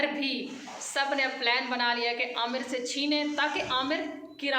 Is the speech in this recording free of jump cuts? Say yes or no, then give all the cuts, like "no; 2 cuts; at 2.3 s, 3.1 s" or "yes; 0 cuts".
yes; 0 cuts